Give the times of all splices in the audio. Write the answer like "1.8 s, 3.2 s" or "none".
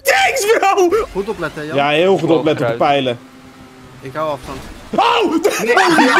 1.0 s